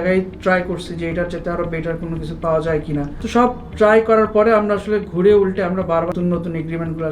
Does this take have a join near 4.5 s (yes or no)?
no